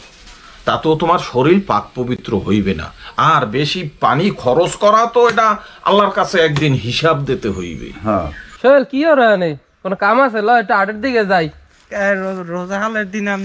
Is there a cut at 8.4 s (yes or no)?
yes